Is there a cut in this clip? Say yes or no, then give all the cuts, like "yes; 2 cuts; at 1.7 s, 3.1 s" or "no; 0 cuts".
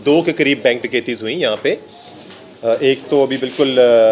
no; 0 cuts